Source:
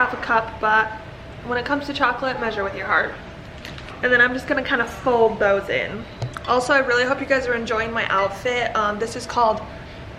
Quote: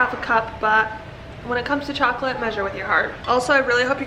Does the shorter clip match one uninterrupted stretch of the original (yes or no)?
no